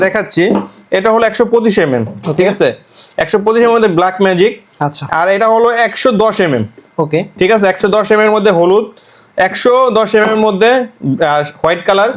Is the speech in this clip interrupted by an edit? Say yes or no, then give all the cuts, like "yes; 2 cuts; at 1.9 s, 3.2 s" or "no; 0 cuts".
no; 0 cuts